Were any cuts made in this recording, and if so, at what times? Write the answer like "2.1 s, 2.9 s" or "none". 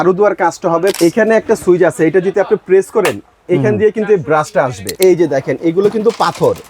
1.0 s, 4.9 s